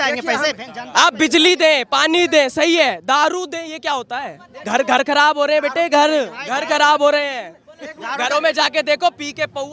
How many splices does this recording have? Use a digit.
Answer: 0